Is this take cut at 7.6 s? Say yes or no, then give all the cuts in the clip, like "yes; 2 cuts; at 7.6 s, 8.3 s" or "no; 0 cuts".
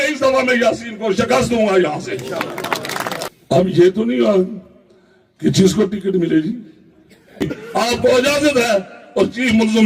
yes; 2 cuts; at 3.3 s, 7.6 s